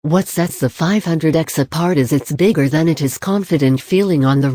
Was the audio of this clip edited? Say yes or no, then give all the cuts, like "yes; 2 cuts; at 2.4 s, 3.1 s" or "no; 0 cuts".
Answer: no; 0 cuts